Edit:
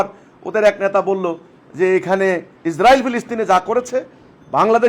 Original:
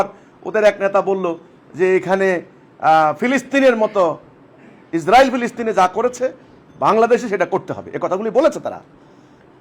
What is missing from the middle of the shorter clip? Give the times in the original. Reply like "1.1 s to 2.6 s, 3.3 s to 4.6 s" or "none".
2.6 s to 4.8 s